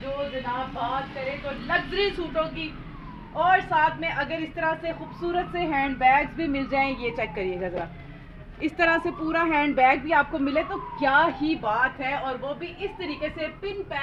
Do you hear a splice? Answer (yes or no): no